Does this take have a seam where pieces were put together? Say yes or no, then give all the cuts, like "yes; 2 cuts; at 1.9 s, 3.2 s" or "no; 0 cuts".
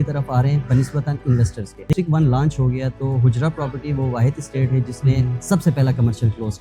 yes; 1 cut; at 1.9 s